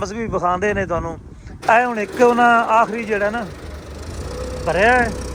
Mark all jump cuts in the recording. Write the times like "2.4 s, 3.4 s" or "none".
1.5 s

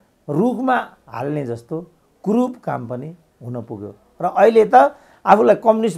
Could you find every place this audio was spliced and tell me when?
none

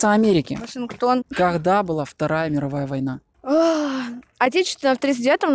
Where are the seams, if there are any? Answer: 1.3 s, 3.3 s

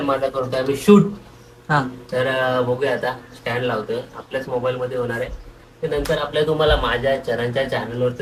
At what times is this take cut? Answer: none

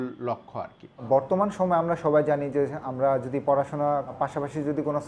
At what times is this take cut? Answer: 0.9 s

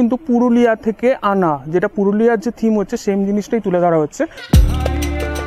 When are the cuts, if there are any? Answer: 4.4 s

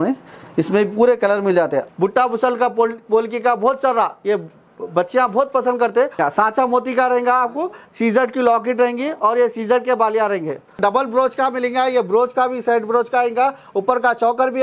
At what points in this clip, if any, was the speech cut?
1.9 s, 6.2 s, 10.7 s

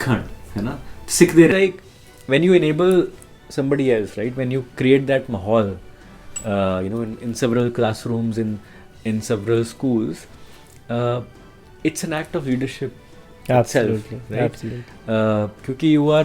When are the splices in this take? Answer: 1.5 s

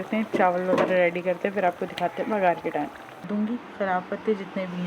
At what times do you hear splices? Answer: 3.2 s

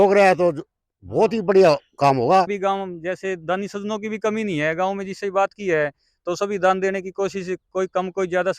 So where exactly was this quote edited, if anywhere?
2.5 s

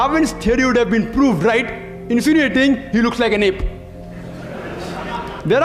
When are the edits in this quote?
none

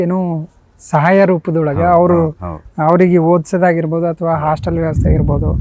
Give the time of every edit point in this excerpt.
none

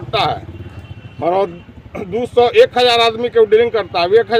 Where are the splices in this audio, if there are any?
none

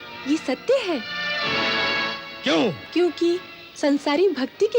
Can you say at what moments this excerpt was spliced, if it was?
none

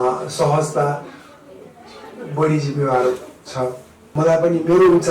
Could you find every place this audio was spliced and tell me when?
4.0 s

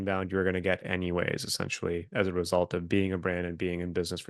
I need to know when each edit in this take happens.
none

